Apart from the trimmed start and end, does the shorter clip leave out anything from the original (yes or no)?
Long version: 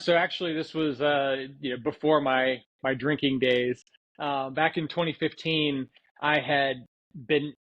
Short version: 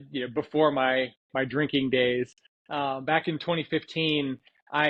no